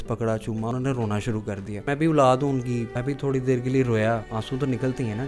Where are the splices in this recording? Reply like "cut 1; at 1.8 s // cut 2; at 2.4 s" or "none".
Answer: cut 1; at 0.7 s // cut 2; at 1.9 s // cut 3; at 2.9 s // cut 4; at 4.3 s